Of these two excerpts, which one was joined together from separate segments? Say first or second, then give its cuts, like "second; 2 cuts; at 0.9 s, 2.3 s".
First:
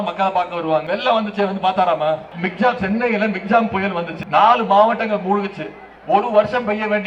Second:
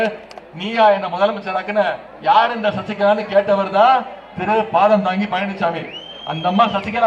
first; 3 cuts; at 0.8 s, 2.3 s, 4.1 s